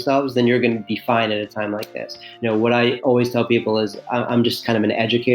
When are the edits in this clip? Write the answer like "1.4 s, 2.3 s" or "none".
2.2 s